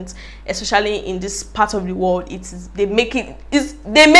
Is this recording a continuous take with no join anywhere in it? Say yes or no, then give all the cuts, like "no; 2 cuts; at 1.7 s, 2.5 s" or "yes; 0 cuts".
yes; 0 cuts